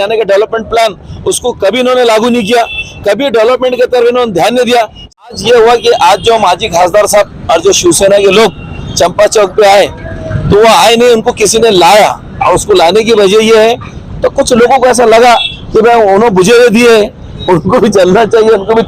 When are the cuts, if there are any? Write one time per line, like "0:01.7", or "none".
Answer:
0:05.4
0:14.0